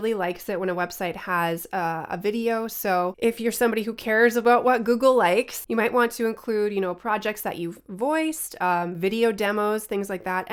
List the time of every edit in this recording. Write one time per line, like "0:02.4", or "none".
none